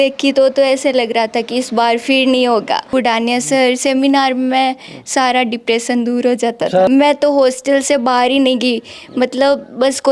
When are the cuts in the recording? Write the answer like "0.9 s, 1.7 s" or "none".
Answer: 2.9 s, 6.9 s